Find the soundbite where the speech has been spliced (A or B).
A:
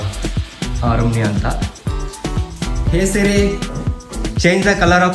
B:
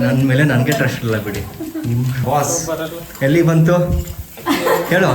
B